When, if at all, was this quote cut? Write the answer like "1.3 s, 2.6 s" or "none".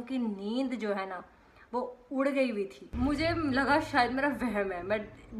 2.8 s